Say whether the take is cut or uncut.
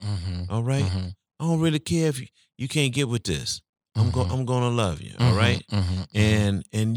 uncut